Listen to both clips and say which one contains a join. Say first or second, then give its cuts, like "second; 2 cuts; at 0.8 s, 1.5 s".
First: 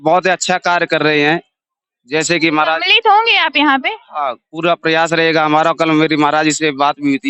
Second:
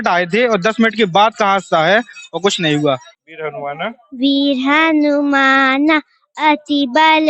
second; 1 cut; at 3.2 s